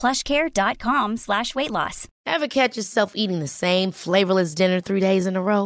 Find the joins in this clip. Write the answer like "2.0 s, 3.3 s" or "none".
2.1 s